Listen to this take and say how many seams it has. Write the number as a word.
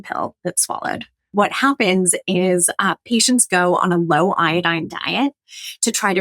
one